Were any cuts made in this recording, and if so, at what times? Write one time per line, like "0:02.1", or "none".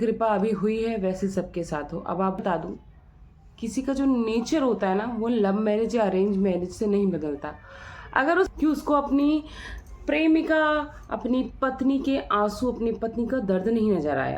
0:02.4
0:08.5